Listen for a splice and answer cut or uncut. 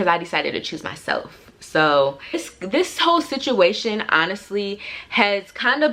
cut